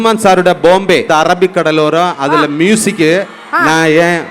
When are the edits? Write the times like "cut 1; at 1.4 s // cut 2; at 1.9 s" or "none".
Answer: cut 1; at 1.1 s